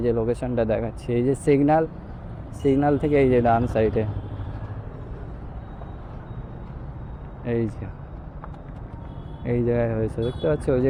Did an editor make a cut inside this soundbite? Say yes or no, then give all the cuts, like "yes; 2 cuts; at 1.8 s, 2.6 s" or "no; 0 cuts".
no; 0 cuts